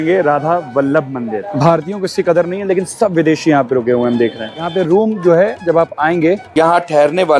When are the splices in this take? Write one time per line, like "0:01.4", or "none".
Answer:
0:01.4
0:04.7
0:06.5